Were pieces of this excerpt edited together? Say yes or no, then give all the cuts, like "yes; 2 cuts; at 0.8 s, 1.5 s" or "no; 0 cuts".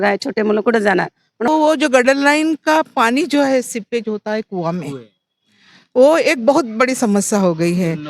yes; 1 cut; at 1.5 s